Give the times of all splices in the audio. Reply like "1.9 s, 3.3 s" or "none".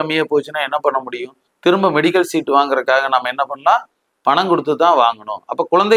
none